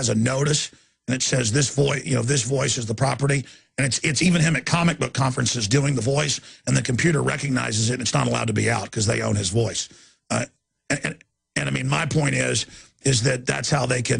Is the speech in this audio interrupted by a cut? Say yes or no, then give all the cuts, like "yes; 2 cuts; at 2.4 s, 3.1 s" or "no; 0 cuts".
yes; 1 cut; at 5.9 s